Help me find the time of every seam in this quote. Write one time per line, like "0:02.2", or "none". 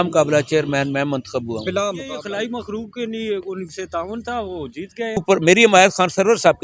0:02.1
0:05.2